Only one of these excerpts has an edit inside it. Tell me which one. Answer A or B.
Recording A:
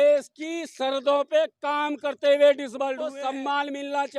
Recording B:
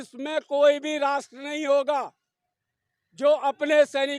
A